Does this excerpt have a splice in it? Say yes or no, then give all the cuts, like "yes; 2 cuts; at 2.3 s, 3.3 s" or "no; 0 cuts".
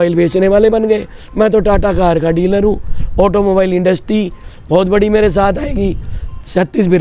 no; 0 cuts